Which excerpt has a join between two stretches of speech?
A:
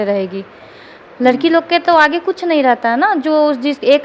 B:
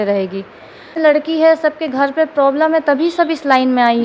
B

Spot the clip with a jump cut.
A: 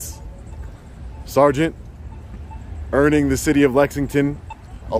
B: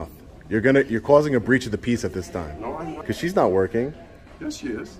B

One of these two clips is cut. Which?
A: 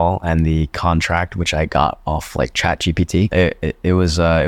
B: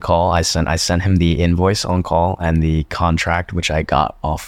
A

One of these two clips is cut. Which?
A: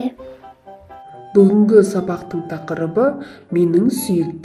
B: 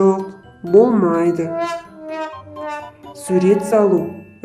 B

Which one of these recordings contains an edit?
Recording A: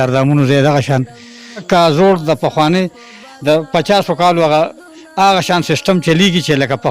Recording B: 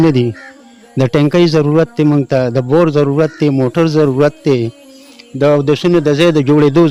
A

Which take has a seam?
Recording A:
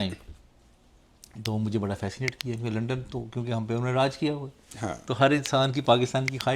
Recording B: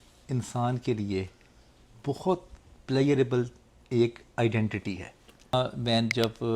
B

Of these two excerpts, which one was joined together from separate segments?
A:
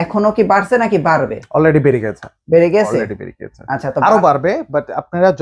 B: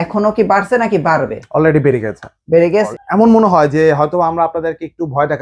B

